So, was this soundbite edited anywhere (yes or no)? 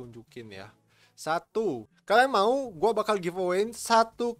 yes